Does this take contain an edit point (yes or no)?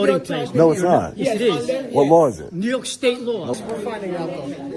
yes